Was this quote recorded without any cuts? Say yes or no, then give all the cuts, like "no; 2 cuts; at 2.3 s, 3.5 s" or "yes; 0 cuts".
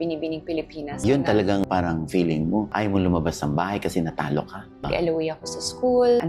no; 2 cuts; at 1.0 s, 4.8 s